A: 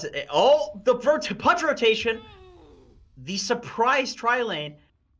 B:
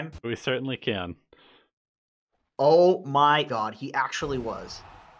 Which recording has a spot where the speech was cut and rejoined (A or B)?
B